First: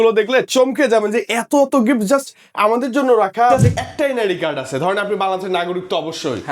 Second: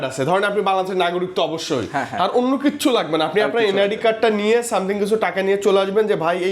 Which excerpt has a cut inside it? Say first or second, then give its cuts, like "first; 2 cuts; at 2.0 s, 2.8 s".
first; 1 cut; at 3.5 s